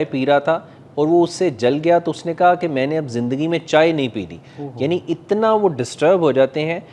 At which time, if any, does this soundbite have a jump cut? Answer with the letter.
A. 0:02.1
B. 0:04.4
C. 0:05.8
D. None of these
D